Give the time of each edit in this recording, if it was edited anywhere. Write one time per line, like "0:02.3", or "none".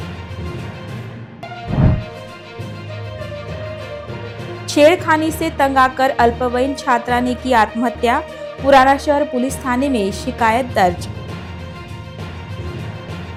none